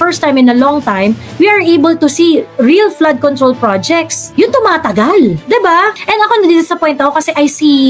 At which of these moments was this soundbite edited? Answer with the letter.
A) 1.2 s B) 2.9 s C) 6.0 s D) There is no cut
C